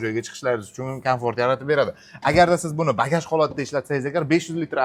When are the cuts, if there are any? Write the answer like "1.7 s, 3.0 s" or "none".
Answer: none